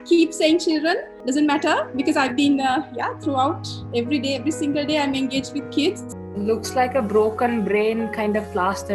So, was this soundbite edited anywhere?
yes; 2 cuts; at 1.1 s, 6.1 s

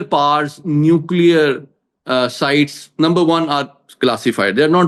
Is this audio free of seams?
yes; 0 cuts

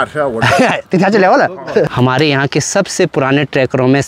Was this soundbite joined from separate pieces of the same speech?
yes; 1 cut; at 1.9 s

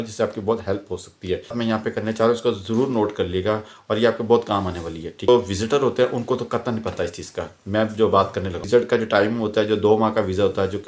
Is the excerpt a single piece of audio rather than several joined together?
no; 3 cuts; at 1.6 s, 5.3 s, 8.6 s

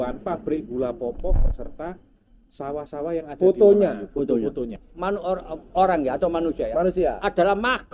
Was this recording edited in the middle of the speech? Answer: yes; 1 cut; at 4.7 s

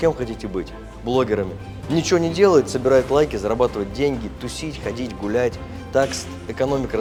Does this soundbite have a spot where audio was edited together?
no; 0 cuts

